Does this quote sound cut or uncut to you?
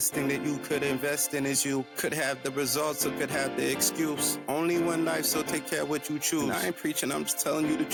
uncut